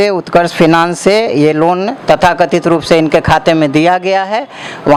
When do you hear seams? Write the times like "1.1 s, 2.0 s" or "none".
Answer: none